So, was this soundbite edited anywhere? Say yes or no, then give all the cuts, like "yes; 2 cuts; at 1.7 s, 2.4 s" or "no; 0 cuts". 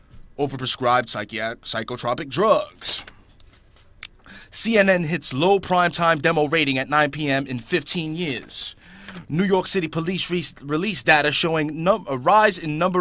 no; 0 cuts